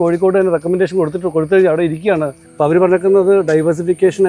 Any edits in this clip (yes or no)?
yes